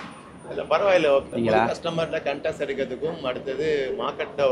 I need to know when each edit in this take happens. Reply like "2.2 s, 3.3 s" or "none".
1.3 s